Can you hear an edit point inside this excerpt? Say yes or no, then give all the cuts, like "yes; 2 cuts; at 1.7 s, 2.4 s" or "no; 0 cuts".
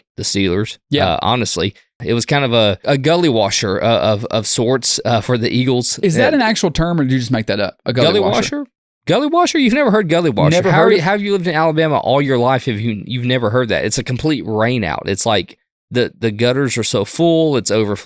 yes; 2 cuts; at 2.0 s, 2.8 s